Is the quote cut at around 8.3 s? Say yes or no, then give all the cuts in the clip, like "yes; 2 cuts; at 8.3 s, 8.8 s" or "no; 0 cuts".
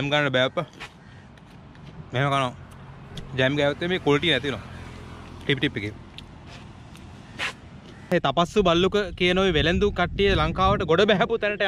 yes; 1 cut; at 8.3 s